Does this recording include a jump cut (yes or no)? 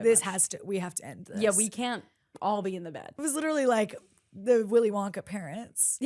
yes